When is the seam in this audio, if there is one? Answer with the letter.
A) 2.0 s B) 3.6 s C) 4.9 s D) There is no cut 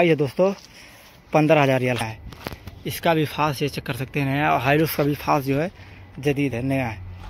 A